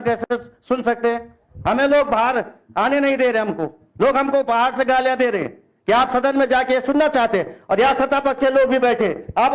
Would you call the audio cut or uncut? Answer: uncut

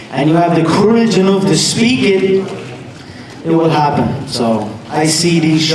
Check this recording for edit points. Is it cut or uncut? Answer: uncut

